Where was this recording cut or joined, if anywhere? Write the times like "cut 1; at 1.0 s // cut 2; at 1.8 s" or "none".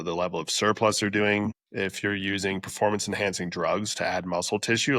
cut 1; at 1.6 s

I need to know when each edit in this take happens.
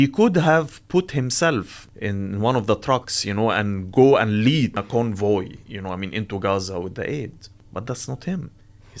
cut 1; at 1.8 s // cut 2; at 4.8 s // cut 3; at 7.7 s

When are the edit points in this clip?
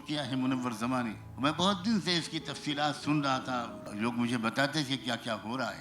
cut 1; at 1.2 s // cut 2; at 3.8 s

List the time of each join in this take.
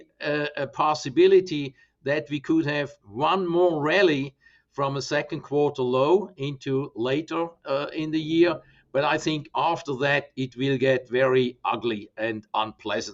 none

